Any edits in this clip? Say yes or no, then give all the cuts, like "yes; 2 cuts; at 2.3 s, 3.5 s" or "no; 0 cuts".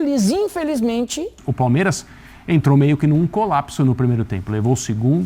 yes; 1 cut; at 1.4 s